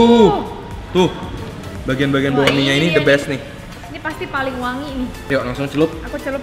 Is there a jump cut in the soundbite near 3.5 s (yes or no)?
no